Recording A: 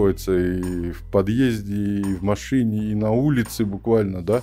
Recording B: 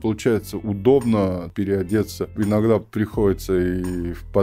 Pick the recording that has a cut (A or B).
B